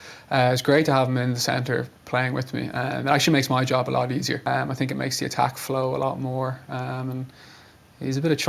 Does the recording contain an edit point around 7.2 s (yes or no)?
no